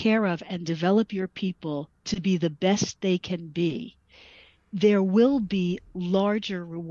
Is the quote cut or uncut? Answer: uncut